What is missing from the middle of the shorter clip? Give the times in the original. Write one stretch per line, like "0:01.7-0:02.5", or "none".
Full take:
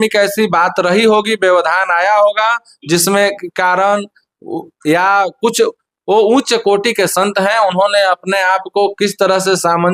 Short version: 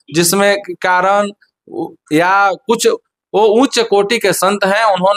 none